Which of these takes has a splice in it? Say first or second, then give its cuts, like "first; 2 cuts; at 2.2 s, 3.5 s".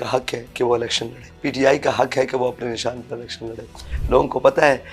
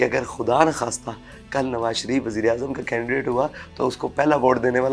first; 2 cuts; at 1.2 s, 3.9 s